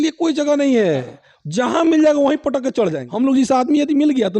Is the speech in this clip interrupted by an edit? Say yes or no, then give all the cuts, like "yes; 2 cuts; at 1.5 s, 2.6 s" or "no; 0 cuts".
yes; 1 cut; at 3.0 s